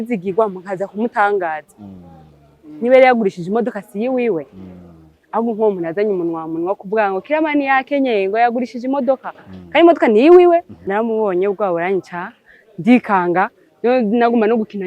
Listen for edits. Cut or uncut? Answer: cut